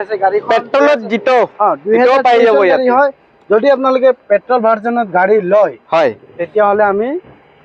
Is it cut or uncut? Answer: uncut